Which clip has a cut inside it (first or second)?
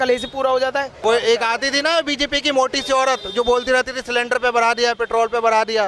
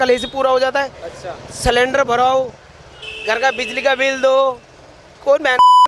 first